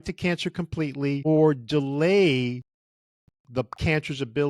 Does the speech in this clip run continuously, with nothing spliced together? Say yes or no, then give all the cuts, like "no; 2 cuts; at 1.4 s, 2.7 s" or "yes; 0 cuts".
no; 1 cut; at 1.2 s